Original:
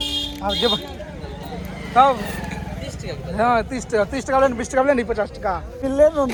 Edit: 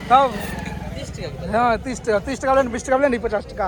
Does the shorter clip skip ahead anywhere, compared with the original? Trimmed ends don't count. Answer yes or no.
no